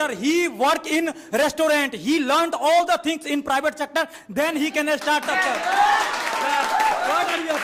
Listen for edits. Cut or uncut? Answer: uncut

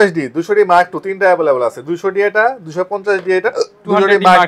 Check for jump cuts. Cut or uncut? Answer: uncut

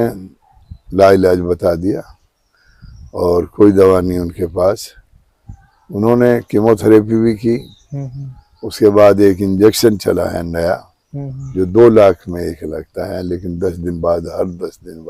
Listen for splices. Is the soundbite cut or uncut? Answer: uncut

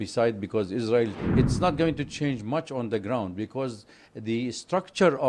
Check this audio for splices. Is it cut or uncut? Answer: cut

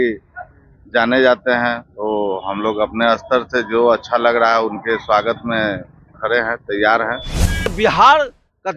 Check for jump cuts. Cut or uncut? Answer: cut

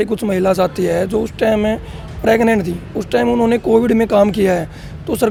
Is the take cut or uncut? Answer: uncut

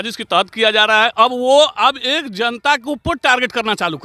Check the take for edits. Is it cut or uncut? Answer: uncut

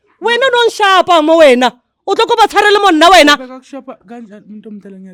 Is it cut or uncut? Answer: uncut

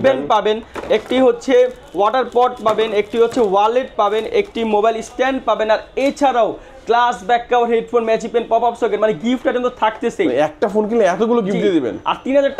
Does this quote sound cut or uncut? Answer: uncut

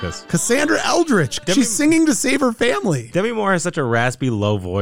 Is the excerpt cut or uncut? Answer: cut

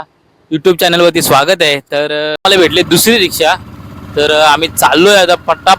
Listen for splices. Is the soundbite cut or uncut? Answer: cut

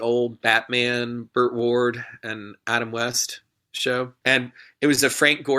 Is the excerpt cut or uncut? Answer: cut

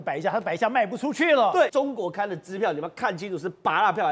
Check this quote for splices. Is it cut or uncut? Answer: cut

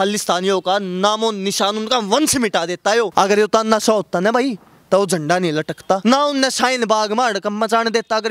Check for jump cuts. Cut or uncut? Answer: cut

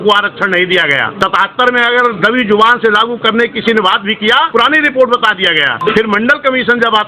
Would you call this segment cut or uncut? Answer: cut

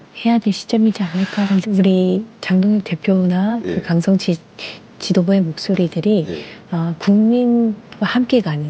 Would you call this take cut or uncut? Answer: cut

